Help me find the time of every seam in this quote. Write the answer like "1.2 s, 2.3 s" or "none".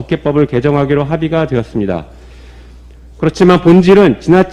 none